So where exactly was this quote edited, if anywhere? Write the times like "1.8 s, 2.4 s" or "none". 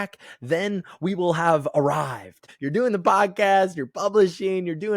2.5 s